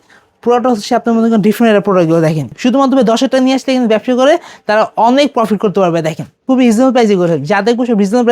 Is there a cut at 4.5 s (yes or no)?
no